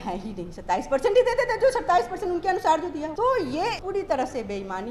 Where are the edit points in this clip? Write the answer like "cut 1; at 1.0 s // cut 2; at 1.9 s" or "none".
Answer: cut 1; at 3.1 s // cut 2; at 3.8 s